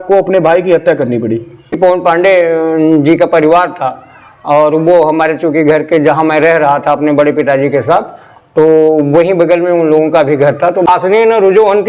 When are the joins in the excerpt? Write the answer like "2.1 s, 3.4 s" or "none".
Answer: 1.7 s, 10.9 s